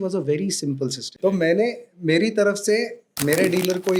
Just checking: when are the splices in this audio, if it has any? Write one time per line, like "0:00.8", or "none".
0:01.0